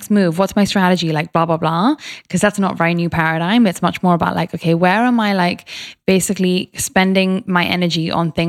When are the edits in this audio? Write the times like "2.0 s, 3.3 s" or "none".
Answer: none

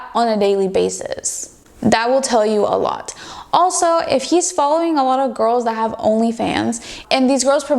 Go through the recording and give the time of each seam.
none

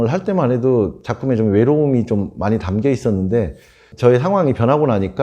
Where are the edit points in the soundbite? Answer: 3.9 s

